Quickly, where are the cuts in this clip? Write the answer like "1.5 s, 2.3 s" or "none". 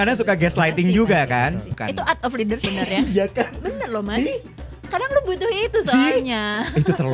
1.7 s, 2.6 s